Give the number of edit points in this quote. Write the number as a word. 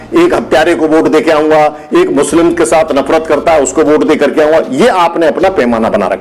zero